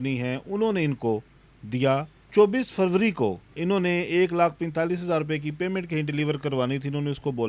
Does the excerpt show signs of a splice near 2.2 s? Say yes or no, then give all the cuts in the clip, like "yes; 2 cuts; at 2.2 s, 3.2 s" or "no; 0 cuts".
yes; 2 cuts; at 2.2 s, 3.5 s